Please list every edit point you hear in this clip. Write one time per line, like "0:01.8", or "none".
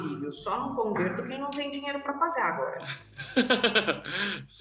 none